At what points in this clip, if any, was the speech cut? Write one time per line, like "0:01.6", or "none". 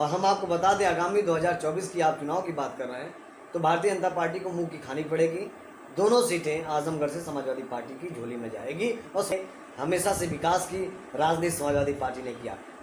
0:09.3